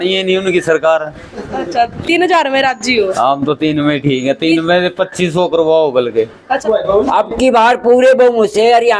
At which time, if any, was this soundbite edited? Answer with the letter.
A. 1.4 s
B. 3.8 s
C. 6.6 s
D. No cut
C